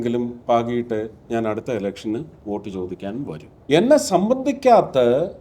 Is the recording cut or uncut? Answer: cut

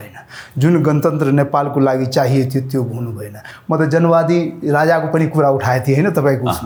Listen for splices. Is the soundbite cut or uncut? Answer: uncut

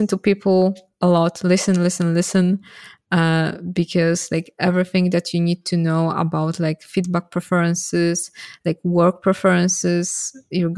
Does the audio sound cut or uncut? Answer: uncut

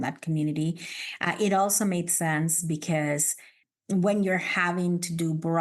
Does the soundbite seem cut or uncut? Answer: cut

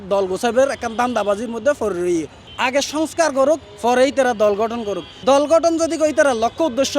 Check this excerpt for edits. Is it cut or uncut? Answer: cut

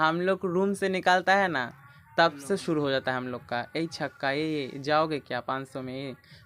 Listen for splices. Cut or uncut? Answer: uncut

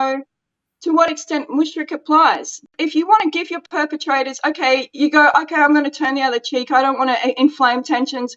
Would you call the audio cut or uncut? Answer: cut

